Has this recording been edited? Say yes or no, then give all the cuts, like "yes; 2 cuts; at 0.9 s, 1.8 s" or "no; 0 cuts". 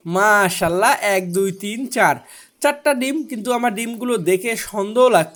no; 0 cuts